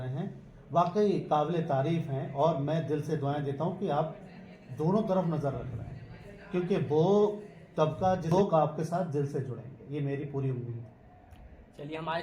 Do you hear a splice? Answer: yes; 1 cut; at 8.3 s

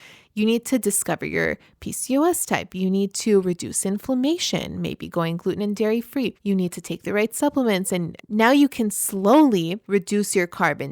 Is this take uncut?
no; 3 cuts; at 6.4 s, 8.2 s, 9.8 s

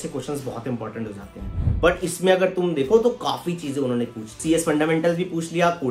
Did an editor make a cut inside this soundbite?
yes; 2 cuts; at 1.6 s, 4.4 s

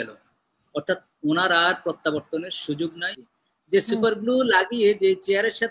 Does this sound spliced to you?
yes; 1 cut; at 3.1 s

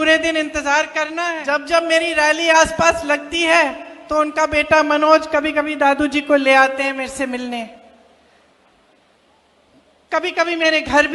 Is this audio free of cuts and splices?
no; 1 cut; at 1.4 s

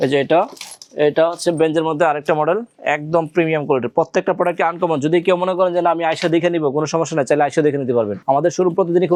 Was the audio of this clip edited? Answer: no; 0 cuts

